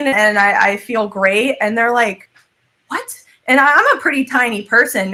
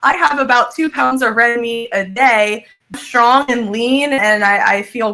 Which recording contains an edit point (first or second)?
second